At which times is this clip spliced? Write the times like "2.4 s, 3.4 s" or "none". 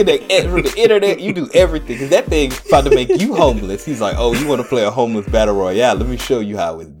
2.6 s